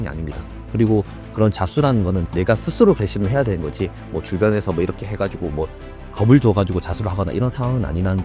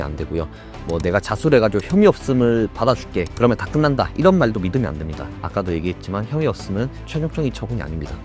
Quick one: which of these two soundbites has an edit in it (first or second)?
first